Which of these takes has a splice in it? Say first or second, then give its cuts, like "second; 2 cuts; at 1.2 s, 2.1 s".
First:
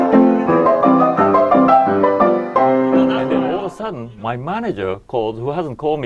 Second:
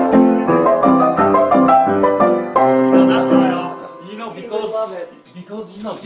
first; 1 cut; at 3.5 s